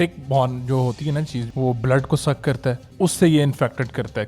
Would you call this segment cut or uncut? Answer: cut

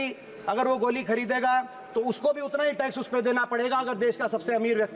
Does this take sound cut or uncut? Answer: uncut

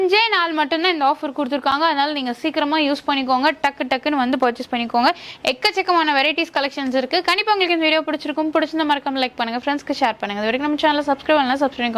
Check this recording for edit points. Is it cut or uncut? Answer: uncut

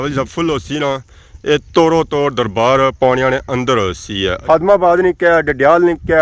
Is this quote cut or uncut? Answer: cut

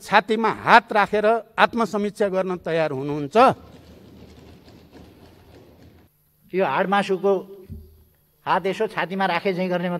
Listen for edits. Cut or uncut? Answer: cut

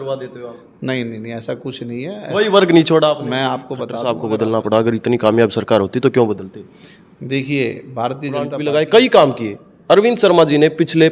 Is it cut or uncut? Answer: cut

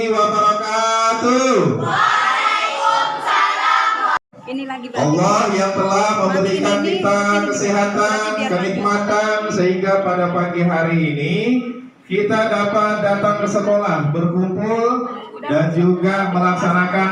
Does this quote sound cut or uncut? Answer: cut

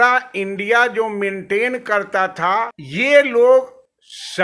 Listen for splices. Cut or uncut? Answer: cut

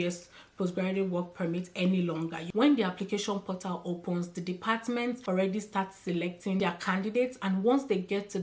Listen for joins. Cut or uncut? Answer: cut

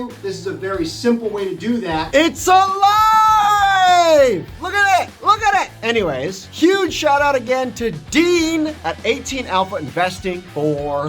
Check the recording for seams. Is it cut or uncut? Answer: cut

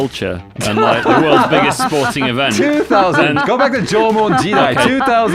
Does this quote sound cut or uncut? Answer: uncut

